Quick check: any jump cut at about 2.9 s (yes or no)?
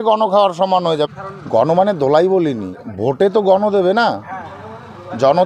yes